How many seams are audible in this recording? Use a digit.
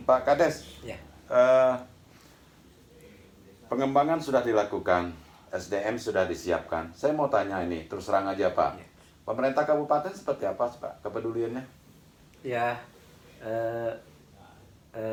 0